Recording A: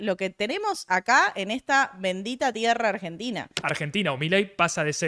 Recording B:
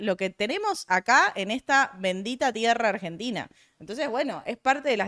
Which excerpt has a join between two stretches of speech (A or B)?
A